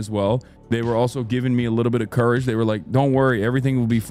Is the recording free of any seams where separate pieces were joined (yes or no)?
yes